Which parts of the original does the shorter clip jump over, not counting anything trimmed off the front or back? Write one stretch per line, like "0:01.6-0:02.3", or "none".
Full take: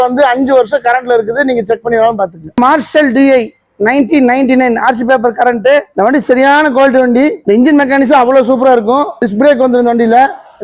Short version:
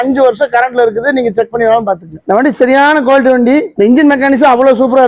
0:02.5-0:05.9